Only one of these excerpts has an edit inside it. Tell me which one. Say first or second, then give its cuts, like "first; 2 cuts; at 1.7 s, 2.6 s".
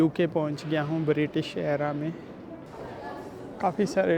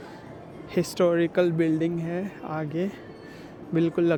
first; 1 cut; at 2.7 s